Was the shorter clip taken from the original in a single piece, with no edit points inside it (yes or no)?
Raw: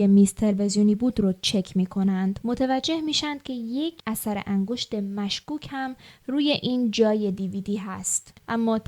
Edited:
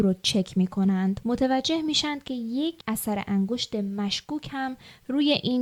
yes